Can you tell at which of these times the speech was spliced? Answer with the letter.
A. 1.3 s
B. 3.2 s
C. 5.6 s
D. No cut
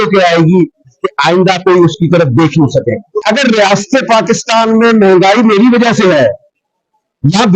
B